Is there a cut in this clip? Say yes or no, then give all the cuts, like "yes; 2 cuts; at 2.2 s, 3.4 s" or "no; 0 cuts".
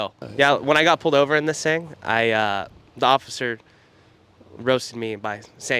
no; 0 cuts